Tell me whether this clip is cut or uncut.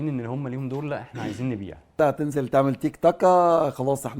cut